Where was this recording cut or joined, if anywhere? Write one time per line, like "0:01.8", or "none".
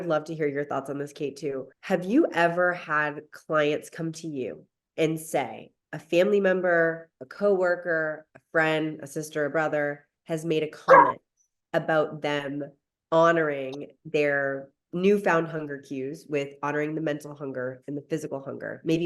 0:01.7